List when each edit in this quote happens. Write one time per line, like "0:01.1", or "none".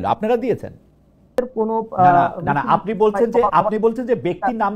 0:01.4